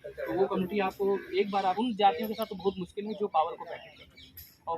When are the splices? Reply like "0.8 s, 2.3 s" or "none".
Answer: 1.8 s